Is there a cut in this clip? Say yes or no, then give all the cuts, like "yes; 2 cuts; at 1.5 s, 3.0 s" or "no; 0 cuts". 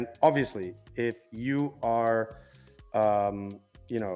no; 0 cuts